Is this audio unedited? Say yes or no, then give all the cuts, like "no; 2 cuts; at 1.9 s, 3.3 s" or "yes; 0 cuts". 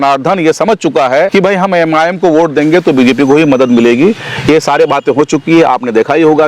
no; 1 cut; at 1.3 s